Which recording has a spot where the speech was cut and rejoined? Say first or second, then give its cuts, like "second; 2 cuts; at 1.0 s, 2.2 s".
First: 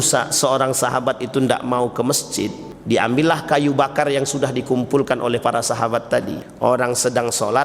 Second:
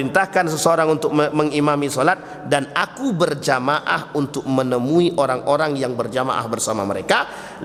first; 2 cuts; at 2.7 s, 6.4 s